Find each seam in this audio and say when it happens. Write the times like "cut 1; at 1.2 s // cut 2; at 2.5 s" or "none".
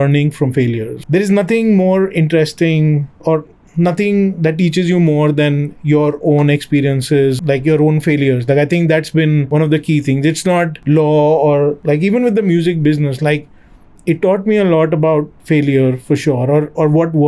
none

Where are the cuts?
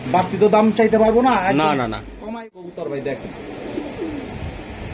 cut 1; at 2.2 s

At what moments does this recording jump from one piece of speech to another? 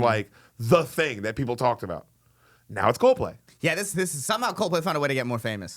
cut 1; at 3.4 s

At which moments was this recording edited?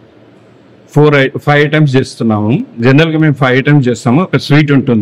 none

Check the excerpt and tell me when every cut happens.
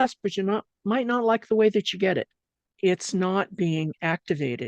cut 1; at 2.5 s

